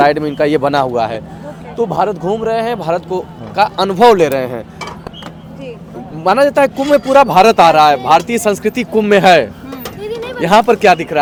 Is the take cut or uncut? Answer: uncut